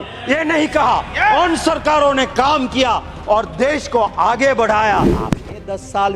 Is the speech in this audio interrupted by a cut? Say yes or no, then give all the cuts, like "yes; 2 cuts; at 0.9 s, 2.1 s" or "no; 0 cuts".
yes; 1 cut; at 5.1 s